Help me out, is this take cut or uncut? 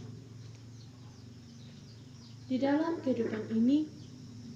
uncut